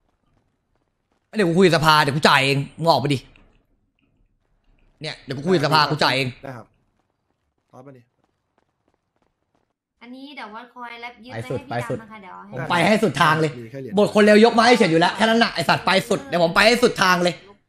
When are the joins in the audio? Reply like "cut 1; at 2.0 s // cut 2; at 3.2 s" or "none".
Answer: cut 1; at 9.8 s